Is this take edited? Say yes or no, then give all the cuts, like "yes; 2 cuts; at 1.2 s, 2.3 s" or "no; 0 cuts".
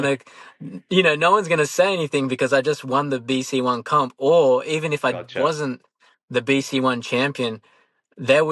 no; 0 cuts